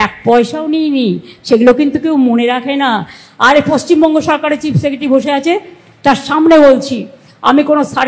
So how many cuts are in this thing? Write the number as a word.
one